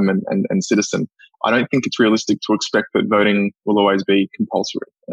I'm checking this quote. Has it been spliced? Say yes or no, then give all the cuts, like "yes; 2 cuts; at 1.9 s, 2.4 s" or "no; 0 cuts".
no; 0 cuts